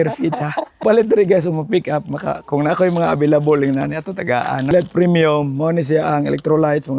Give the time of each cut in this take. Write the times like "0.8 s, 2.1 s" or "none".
0.8 s, 4.7 s